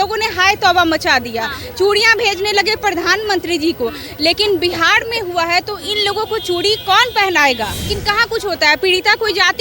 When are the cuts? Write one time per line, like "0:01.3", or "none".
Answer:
0:07.9